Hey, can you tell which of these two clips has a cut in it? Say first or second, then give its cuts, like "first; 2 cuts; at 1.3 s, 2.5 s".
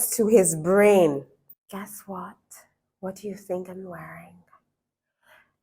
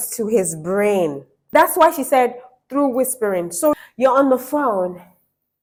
first; 1 cut; at 1.3 s